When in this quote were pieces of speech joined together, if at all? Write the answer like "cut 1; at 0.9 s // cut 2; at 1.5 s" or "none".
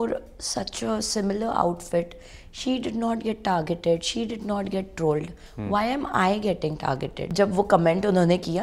cut 1; at 7.3 s